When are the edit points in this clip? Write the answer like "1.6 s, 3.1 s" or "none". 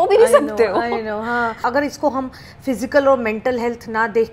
1.7 s